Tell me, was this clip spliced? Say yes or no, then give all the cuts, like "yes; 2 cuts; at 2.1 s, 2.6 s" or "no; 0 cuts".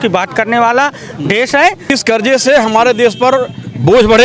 yes; 1 cut; at 1.9 s